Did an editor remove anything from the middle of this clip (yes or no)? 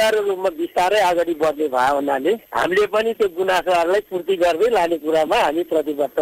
no